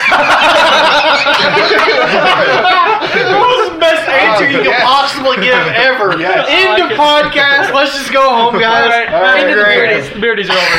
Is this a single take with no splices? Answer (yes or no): yes